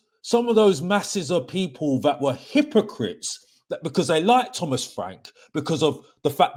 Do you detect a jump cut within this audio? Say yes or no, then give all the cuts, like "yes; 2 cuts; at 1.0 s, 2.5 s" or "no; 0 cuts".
no; 0 cuts